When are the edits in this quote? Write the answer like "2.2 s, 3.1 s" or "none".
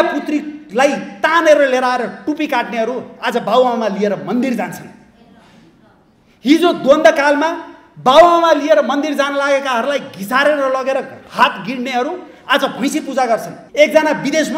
13.6 s